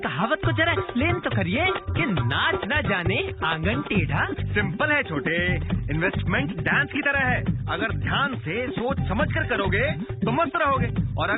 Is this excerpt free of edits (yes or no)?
yes